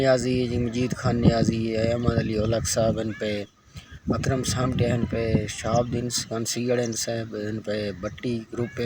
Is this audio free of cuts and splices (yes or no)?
yes